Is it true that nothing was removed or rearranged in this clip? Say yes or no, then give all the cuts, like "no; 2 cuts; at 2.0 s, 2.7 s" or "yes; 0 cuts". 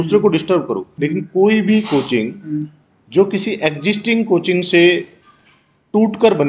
no; 1 cut; at 0.9 s